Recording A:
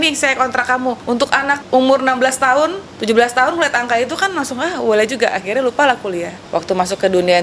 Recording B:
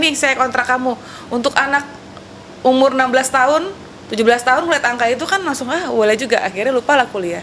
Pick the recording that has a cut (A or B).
A